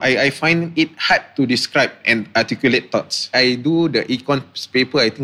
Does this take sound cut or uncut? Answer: cut